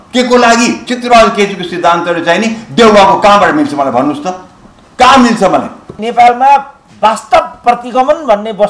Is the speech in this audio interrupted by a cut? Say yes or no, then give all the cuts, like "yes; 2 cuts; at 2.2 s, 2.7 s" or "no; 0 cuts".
yes; 2 cuts; at 0.9 s, 6.0 s